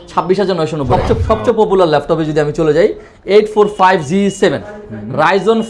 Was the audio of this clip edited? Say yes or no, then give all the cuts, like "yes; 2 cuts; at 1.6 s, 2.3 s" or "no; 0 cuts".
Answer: yes; 1 cut; at 1.0 s